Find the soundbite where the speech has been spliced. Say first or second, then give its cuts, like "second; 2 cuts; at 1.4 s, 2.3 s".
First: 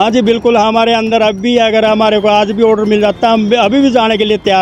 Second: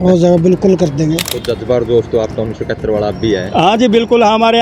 second; 1 cut; at 1.3 s